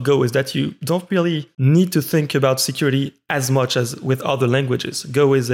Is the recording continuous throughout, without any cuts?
no; 1 cut; at 1.5 s

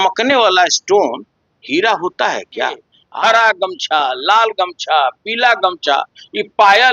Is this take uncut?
no; 1 cut; at 3.0 s

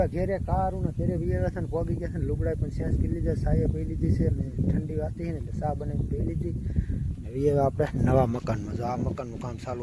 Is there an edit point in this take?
no; 0 cuts

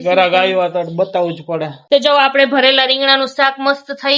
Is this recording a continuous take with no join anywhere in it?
no; 1 cut; at 1.8 s

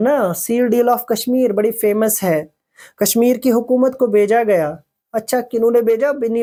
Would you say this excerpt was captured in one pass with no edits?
yes; 0 cuts

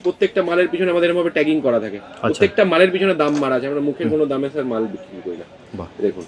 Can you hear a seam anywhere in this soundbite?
no; 0 cuts

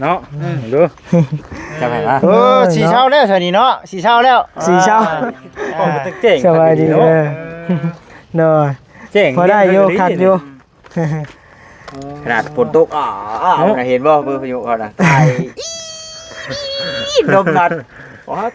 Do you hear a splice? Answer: no; 0 cuts

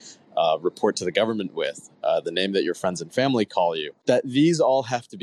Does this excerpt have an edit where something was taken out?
yes; 1 cut; at 3.9 s

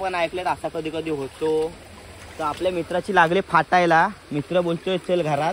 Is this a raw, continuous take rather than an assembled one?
yes; 0 cuts

